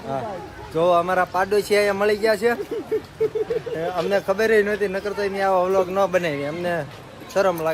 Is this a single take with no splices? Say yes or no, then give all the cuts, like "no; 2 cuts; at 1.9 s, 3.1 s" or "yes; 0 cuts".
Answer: yes; 0 cuts